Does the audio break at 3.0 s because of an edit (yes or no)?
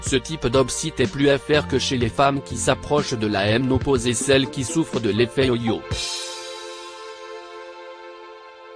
no